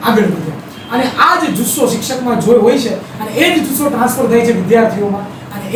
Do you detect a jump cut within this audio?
no; 0 cuts

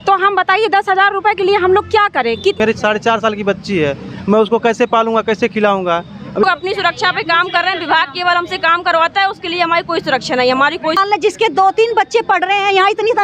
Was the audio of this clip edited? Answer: yes; 3 cuts; at 2.6 s, 6.4 s, 11.0 s

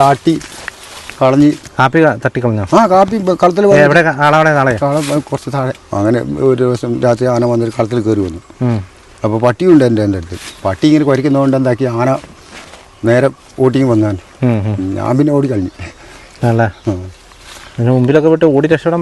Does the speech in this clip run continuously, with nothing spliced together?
no; 2 cuts; at 1.7 s, 5.8 s

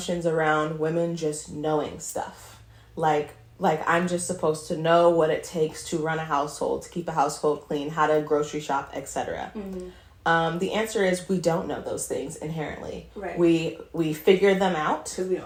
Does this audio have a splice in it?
no; 0 cuts

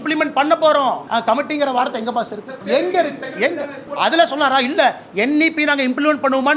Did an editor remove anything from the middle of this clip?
yes; 3 cuts; at 1.0 s, 2.6 s, 3.8 s

